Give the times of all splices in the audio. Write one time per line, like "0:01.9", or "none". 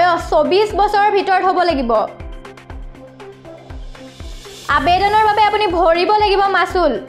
none